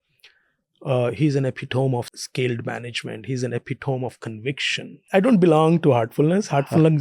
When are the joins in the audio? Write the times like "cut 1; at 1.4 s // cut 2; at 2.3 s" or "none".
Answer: cut 1; at 2.1 s // cut 2; at 5.1 s